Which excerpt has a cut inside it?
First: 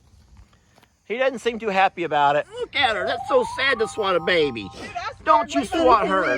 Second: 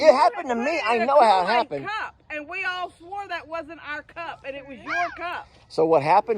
first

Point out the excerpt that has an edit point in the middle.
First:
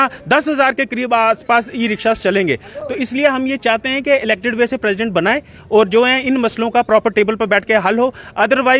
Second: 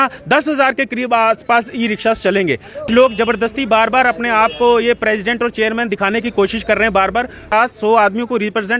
second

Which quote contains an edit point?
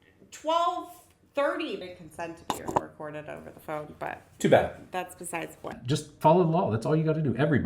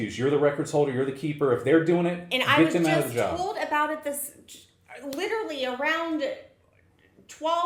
first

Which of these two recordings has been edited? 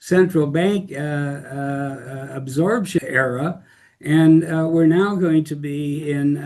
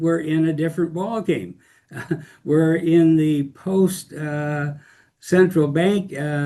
first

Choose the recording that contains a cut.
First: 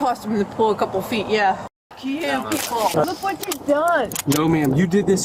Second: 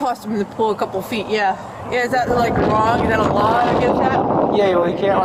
first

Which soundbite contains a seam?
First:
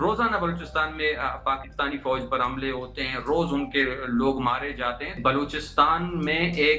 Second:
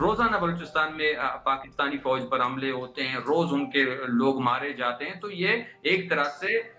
first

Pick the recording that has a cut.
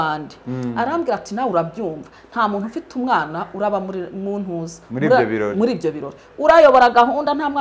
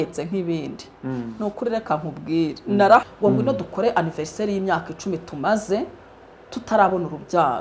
second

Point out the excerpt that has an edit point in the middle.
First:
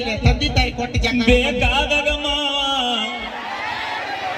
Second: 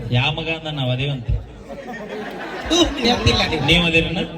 second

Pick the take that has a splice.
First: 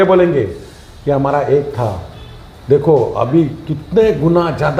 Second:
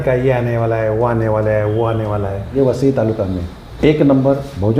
second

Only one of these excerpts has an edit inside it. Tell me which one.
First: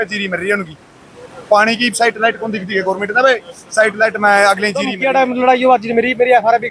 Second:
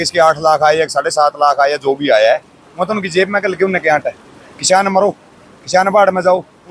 first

